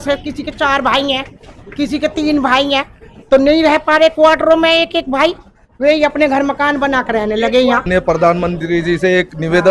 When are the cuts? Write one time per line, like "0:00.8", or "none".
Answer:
0:07.9